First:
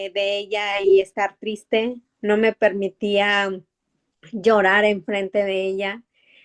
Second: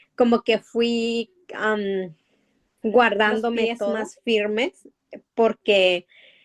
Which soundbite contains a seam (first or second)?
second